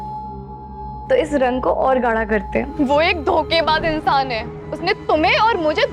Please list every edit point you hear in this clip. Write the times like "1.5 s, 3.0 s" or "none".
2.7 s